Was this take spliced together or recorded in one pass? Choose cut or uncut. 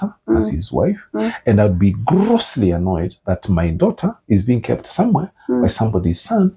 uncut